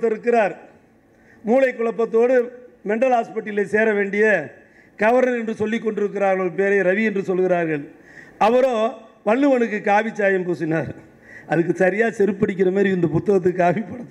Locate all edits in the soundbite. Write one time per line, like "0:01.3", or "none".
none